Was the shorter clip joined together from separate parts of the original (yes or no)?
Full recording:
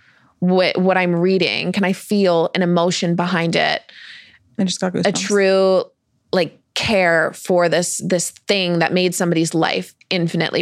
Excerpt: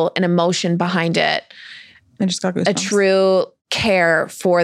yes